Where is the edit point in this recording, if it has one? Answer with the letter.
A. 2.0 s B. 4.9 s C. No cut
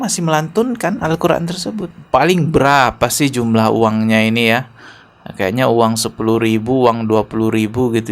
A